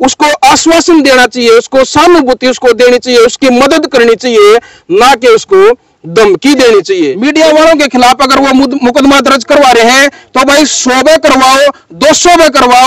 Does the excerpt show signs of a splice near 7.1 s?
yes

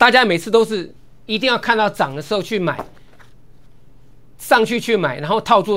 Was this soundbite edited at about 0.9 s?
no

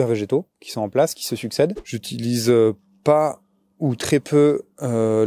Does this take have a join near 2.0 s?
yes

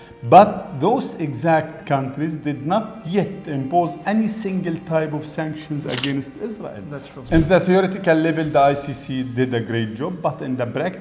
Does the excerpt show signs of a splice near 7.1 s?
yes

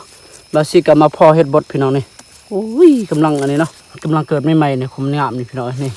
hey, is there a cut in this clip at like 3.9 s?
yes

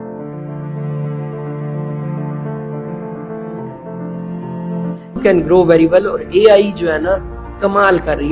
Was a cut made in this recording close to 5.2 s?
yes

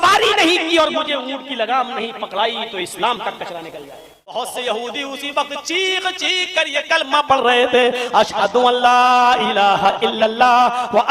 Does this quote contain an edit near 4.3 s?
yes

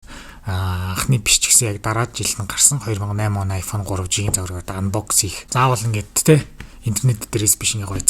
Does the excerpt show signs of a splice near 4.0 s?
no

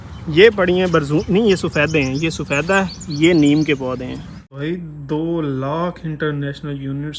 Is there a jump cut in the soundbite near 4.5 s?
yes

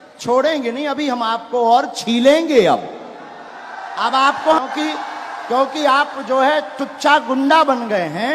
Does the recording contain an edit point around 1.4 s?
no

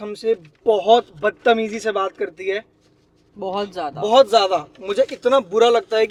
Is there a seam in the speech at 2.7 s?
no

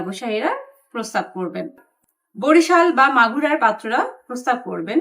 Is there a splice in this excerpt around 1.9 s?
yes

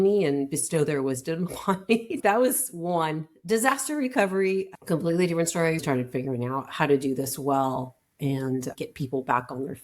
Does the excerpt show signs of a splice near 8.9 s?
no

